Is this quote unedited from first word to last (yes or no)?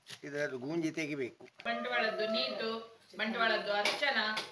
no